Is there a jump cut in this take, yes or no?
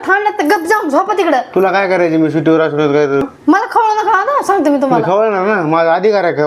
yes